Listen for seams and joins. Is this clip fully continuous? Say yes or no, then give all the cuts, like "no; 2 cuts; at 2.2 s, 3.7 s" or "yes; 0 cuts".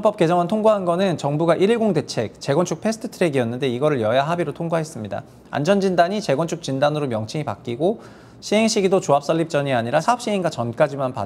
yes; 0 cuts